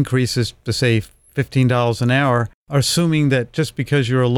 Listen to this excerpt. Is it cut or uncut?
cut